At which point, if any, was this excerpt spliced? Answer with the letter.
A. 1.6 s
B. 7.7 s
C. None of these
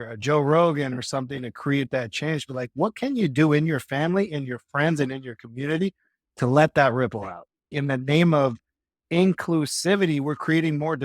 B